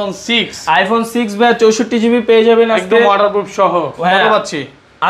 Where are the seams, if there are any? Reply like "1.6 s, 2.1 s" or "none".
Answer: none